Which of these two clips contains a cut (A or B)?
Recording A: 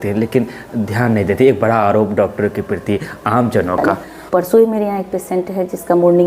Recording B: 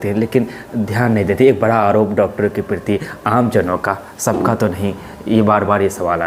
A